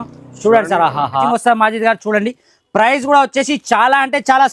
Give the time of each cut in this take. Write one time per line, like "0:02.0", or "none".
0:01.2